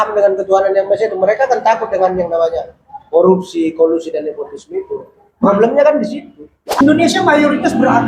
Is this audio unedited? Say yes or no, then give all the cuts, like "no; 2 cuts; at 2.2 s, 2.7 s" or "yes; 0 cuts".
no; 1 cut; at 6.8 s